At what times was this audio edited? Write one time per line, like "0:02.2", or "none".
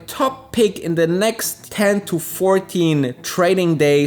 0:01.6